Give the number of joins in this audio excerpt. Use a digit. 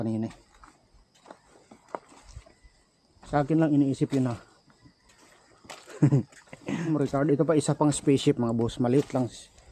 1